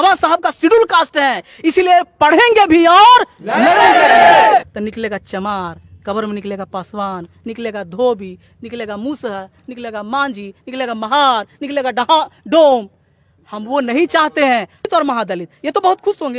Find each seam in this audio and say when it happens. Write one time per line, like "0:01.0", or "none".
0:04.8
0:14.9